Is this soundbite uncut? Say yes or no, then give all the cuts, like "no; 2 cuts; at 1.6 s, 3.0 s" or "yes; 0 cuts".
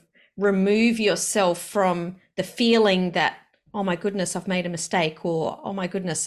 yes; 0 cuts